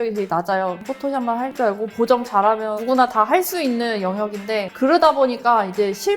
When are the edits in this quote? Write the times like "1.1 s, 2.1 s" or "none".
1.0 s